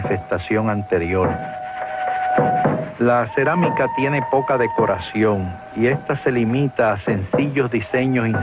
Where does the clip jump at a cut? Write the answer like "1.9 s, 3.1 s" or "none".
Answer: 1.4 s